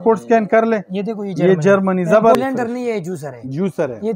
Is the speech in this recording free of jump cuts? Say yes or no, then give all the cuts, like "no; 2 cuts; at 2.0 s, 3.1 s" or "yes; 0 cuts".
no; 1 cut; at 2.4 s